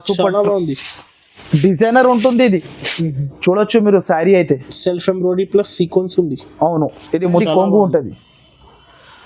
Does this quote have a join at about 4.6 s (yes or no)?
no